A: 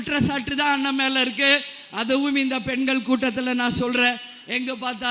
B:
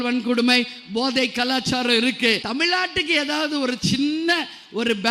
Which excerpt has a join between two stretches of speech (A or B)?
B